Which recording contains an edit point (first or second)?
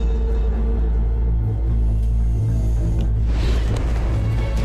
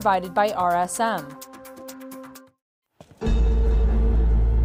second